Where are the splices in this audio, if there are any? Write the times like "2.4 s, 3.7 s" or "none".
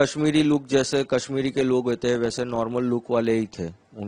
none